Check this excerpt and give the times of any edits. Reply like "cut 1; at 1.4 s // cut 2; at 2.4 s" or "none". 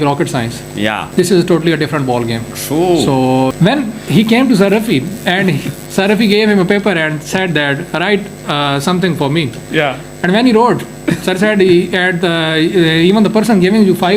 cut 1; at 1.0 s // cut 2; at 3.5 s